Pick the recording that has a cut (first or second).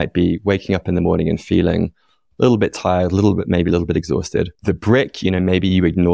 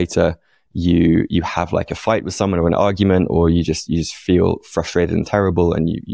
first